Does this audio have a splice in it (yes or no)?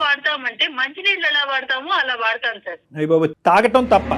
no